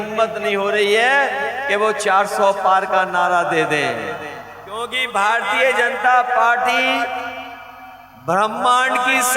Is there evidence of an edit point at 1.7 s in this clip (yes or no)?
no